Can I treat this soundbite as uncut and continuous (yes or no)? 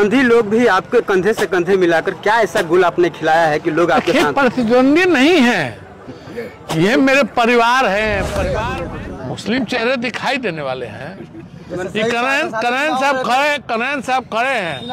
no